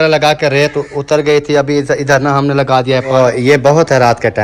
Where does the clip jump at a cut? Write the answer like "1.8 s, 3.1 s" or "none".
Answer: 3.1 s